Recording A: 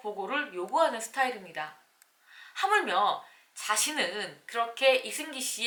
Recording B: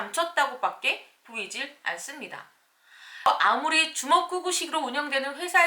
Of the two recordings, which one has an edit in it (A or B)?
B